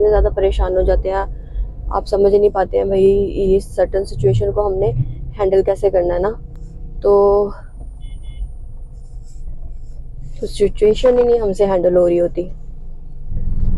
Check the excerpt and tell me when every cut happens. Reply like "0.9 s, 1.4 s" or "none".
none